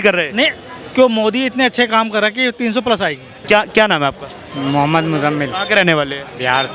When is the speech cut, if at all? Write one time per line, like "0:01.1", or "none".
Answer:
0:03.3